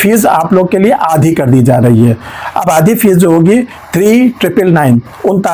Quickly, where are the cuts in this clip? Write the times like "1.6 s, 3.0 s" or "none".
none

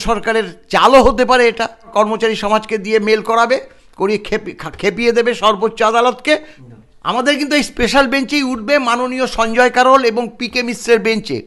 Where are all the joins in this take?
1.9 s, 6.6 s

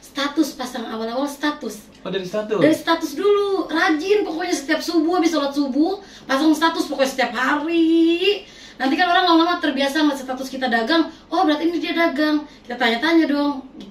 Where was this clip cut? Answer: none

